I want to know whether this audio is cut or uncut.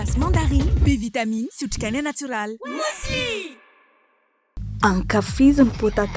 uncut